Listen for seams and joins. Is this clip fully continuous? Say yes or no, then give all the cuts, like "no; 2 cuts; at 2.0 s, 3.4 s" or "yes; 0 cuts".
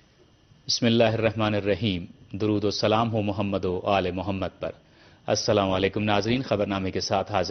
yes; 0 cuts